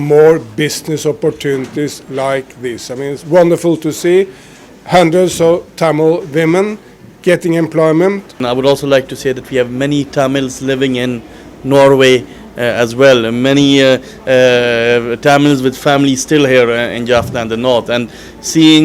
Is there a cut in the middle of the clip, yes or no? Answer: yes